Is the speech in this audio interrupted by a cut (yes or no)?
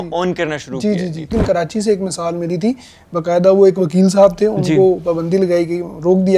yes